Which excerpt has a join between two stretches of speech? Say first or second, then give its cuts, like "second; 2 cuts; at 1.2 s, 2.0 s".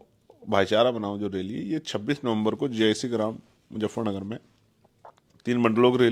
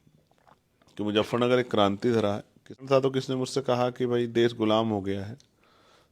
second; 1 cut; at 2.8 s